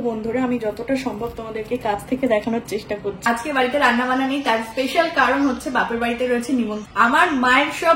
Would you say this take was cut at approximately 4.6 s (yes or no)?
no